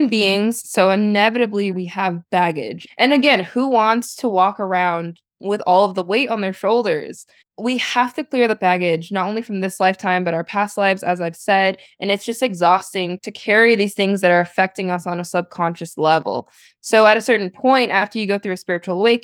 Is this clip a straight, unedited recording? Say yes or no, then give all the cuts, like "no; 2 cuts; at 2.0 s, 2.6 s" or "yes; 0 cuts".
no; 1 cut; at 1.7 s